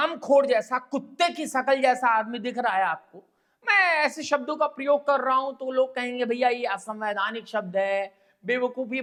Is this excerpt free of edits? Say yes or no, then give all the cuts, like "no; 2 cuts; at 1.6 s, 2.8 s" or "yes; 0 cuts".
yes; 0 cuts